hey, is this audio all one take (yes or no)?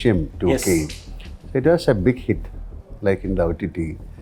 yes